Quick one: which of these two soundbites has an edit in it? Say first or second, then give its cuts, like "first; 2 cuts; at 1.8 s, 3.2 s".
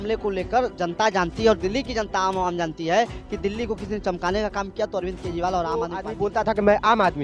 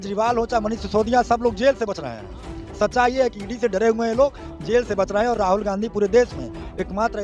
first; 1 cut; at 6.0 s